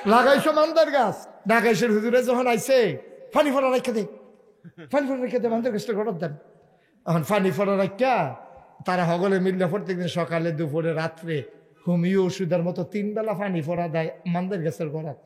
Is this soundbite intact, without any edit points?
no; 1 cut; at 1.3 s

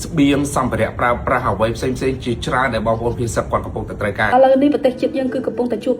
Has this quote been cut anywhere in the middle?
yes; 1 cut; at 4.3 s

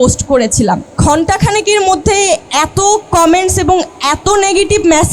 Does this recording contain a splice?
yes; 2 cuts; at 1.0 s, 2.5 s

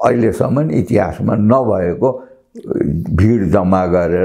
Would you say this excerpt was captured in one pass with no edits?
yes; 0 cuts

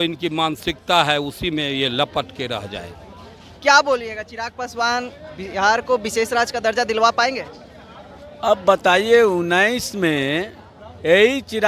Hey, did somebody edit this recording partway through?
no; 0 cuts

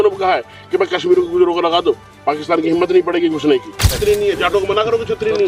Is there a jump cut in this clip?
yes; 1 cut; at 3.9 s

